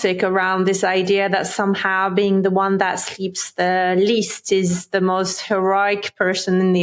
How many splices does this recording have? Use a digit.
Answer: 0